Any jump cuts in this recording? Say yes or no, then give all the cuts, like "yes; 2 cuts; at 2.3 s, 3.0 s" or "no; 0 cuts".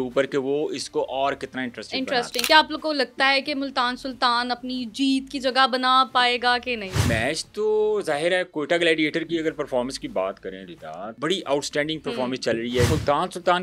yes; 4 cuts; at 2.4 s, 7.0 s, 11.1 s, 12.9 s